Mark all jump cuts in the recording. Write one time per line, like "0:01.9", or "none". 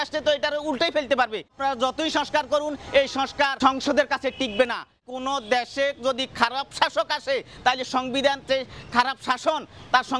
0:01.5
0:03.5
0:05.0